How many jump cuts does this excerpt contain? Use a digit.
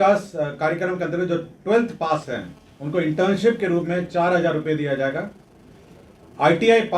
0